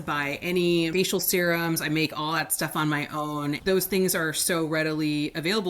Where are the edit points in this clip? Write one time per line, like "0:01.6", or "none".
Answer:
0:00.9
0:03.6